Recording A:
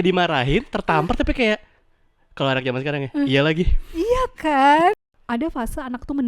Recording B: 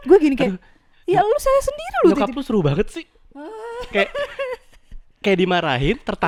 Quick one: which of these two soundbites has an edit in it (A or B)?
A